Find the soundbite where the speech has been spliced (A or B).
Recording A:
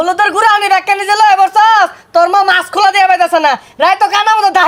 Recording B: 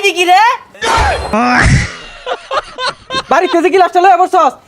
B